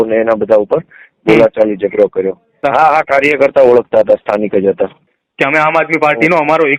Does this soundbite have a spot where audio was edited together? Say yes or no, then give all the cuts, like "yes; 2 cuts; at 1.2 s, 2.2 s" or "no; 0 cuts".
yes; 2 cuts; at 2.6 s, 5.1 s